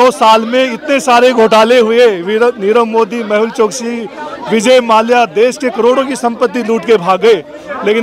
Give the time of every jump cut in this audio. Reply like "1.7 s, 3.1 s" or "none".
none